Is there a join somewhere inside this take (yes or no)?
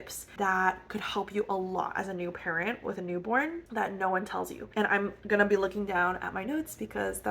no